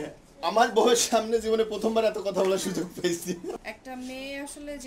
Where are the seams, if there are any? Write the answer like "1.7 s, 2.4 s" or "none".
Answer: 3.6 s